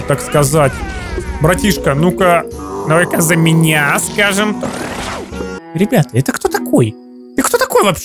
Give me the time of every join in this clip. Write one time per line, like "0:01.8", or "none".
0:05.6